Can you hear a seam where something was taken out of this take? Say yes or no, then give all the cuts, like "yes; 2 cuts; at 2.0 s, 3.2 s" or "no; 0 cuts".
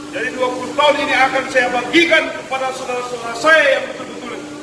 no; 0 cuts